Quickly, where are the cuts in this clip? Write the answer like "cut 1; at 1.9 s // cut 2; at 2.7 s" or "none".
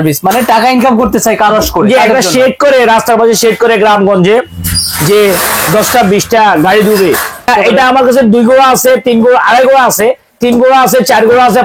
cut 1; at 7.5 s